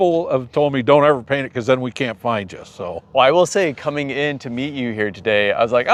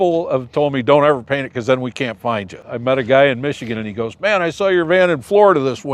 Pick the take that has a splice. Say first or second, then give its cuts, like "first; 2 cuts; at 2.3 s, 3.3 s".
second; 1 cut; at 2.6 s